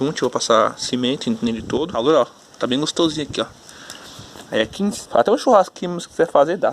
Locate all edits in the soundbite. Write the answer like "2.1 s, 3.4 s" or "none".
1.9 s, 5.0 s